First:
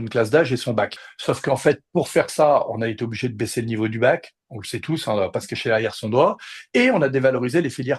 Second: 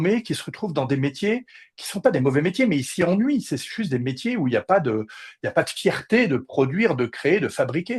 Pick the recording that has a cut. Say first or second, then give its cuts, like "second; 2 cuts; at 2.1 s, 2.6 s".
first; 1 cut; at 1.0 s